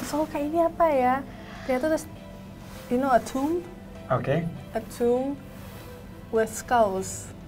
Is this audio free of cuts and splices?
yes; 0 cuts

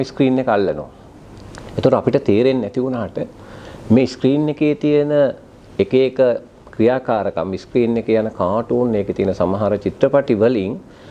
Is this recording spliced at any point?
no; 0 cuts

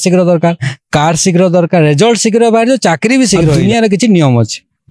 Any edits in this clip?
yes; 1 cut; at 3.6 s

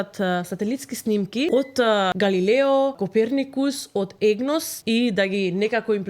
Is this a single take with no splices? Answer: no; 3 cuts; at 1.8 s, 3.0 s, 4.7 s

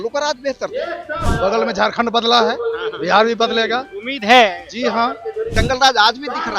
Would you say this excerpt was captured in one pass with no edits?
no; 2 cuts; at 1.3 s, 5.5 s

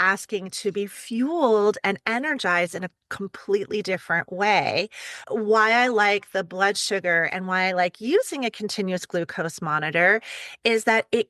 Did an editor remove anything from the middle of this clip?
yes; 1 cut; at 5.2 s

